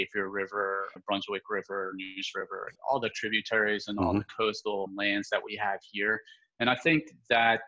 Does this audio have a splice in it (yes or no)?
yes